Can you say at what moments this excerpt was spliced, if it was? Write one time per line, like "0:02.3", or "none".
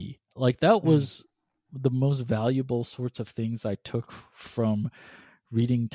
none